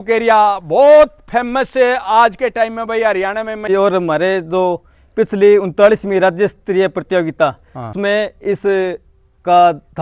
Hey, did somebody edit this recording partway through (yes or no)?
yes